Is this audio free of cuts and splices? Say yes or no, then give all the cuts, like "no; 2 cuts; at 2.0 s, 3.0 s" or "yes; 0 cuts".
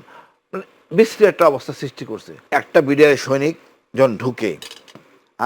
no; 1 cut; at 2.3 s